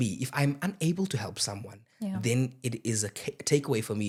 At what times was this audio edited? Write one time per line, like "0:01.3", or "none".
none